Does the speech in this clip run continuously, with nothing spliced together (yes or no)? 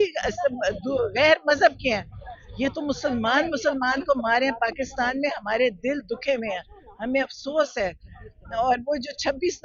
yes